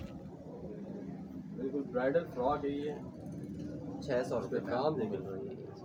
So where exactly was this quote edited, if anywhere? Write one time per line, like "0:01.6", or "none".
none